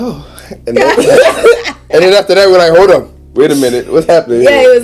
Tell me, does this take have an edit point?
no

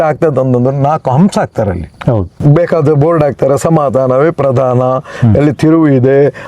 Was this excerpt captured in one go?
no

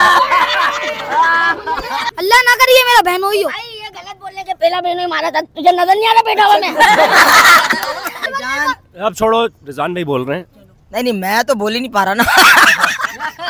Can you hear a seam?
no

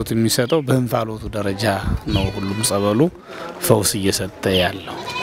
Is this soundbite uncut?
yes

